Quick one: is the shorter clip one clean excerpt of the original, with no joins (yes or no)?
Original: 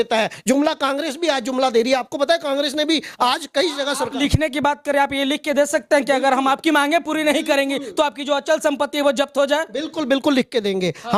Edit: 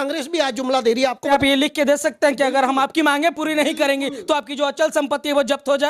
no